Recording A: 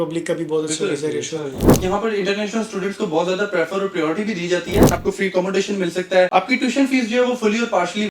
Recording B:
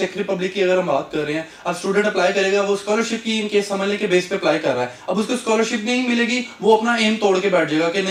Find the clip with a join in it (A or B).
A